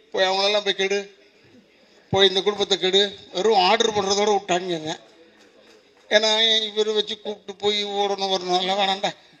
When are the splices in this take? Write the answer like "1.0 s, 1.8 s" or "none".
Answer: none